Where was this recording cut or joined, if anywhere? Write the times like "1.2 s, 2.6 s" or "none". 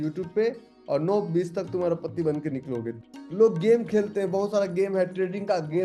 3.0 s

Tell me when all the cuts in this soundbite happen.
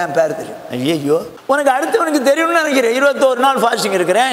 1.3 s

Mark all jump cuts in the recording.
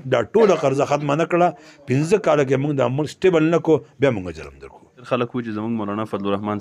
5.0 s

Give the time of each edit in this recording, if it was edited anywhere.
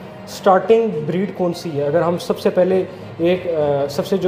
none

